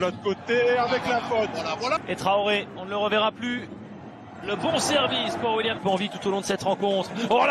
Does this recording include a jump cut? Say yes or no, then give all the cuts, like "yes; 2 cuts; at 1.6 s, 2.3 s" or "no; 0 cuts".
yes; 2 cuts; at 2.0 s, 5.8 s